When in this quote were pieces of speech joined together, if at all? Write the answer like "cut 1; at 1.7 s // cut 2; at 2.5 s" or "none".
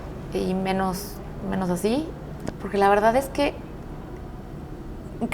cut 1; at 2.3 s